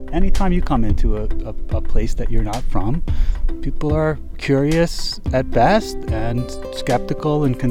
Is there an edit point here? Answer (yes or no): no